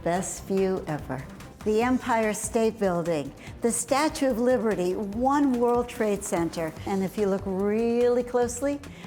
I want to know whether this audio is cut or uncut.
cut